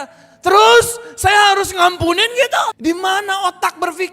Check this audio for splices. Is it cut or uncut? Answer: cut